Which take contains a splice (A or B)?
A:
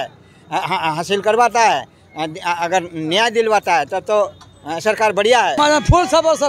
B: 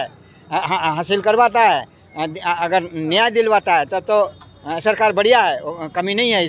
A